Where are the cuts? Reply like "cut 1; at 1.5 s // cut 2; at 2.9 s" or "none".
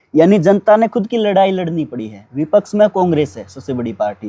none